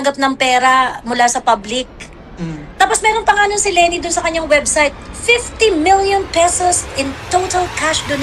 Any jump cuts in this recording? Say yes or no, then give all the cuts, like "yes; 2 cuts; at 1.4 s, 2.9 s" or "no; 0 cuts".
no; 0 cuts